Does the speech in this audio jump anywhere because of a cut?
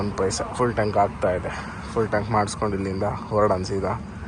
no; 0 cuts

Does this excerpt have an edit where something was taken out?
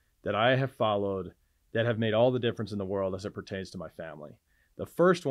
no; 0 cuts

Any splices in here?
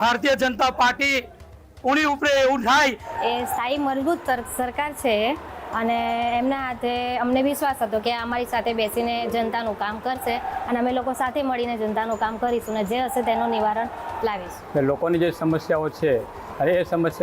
yes; 2 cuts; at 3.0 s, 14.5 s

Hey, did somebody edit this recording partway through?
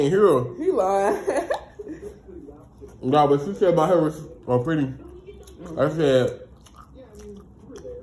yes; 1 cut; at 3.5 s

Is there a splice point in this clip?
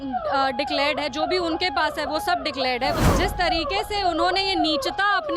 yes; 1 cut; at 3.0 s

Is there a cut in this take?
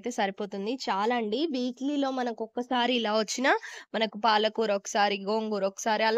no; 0 cuts

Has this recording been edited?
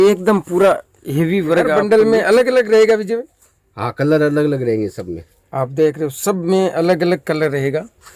yes; 1 cut; at 1.8 s

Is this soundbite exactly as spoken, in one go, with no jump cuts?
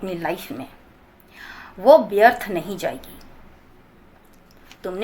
yes; 0 cuts

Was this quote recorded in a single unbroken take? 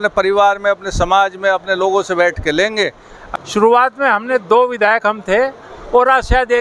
no; 1 cut; at 3.1 s

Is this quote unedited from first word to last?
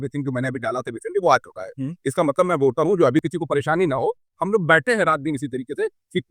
no; 1 cut; at 3.2 s

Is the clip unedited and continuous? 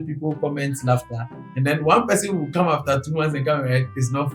yes; 0 cuts

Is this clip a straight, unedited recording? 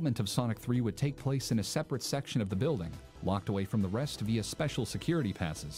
yes; 0 cuts

